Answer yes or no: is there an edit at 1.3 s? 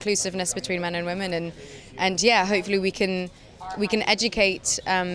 no